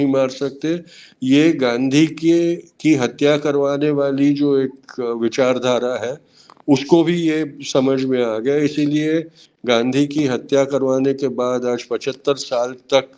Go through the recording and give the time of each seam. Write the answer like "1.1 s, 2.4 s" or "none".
none

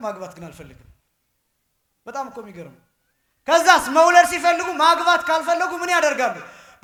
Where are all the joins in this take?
none

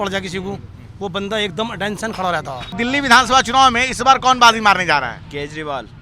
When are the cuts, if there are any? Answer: 2.8 s

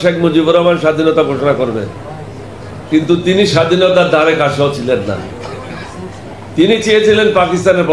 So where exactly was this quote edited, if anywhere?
none

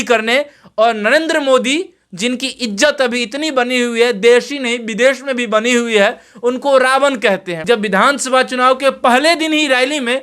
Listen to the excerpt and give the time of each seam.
7.5 s

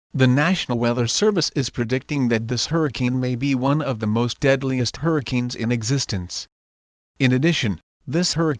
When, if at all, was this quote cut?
1.0 s

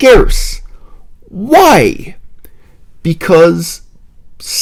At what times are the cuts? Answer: none

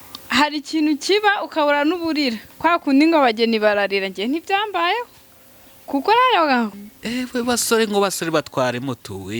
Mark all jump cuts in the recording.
6.8 s

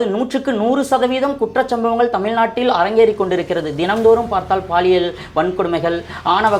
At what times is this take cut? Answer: none

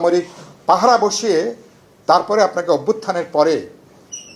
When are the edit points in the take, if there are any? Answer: none

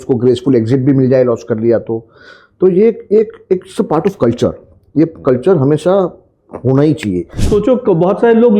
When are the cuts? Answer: 7.4 s

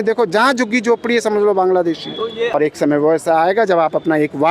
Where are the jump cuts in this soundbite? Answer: 2.5 s

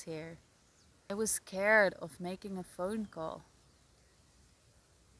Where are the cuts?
1.1 s

